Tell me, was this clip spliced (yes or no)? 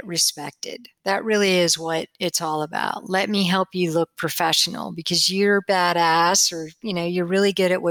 no